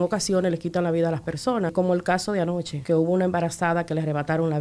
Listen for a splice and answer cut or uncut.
cut